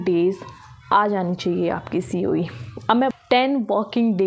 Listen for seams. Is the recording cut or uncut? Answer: cut